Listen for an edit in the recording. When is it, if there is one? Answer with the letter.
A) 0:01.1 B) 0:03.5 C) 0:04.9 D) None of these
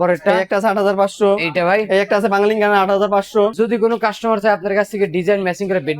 B